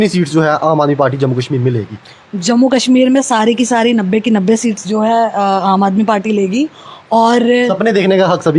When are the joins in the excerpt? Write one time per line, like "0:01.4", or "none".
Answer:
none